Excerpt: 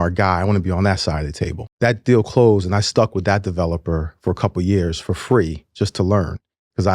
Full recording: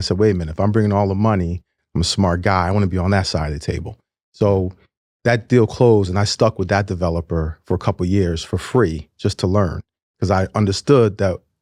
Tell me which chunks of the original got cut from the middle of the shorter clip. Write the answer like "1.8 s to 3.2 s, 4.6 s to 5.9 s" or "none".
3.9 s to 5.1 s